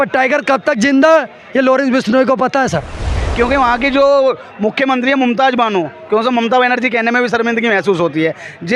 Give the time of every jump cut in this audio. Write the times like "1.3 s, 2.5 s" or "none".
3.0 s